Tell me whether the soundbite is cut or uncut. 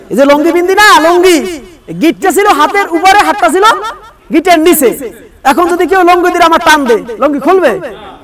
uncut